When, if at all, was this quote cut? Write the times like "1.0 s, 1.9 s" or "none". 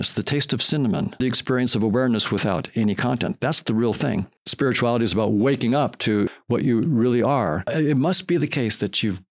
1.2 s, 4.4 s, 6.3 s, 7.6 s